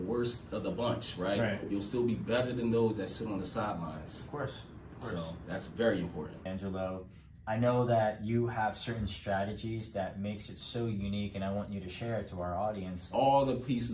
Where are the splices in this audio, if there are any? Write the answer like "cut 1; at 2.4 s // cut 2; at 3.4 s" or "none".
cut 1; at 6.5 s // cut 2; at 13.0 s